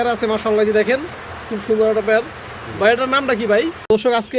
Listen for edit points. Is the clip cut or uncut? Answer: cut